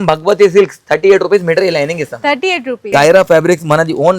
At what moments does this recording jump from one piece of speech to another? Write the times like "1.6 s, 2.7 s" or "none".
2.9 s